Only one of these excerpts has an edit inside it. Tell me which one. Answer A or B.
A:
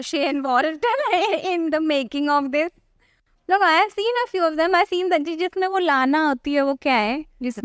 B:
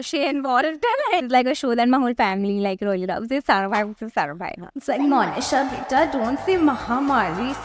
B